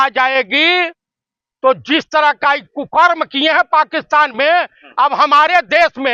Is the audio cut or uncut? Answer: uncut